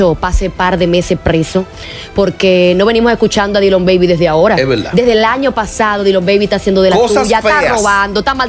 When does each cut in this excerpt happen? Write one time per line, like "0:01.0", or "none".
none